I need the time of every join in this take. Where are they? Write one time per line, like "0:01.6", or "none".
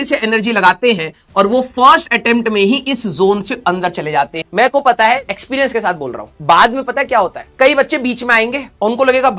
0:04.4